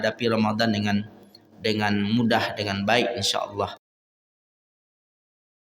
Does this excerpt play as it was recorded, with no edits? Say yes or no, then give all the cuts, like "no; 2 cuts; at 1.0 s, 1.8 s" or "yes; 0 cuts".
yes; 0 cuts